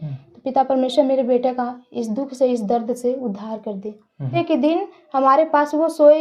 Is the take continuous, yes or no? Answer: no